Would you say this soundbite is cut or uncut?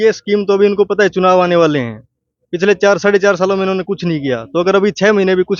uncut